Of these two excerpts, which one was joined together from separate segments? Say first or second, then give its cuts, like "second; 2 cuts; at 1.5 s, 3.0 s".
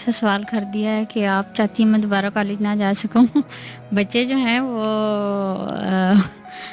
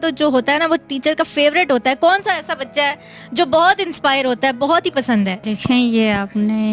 second; 1 cut; at 5.5 s